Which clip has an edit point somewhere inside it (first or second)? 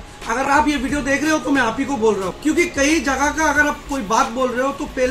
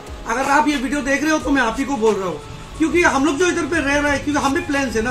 first